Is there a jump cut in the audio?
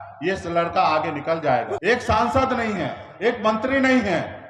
yes; 1 cut; at 1.7 s

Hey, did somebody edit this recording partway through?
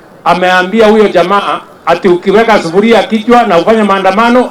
no; 0 cuts

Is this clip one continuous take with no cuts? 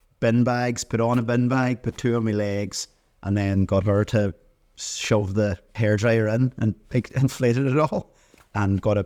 yes; 0 cuts

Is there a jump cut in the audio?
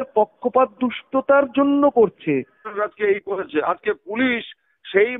yes; 1 cut; at 2.6 s

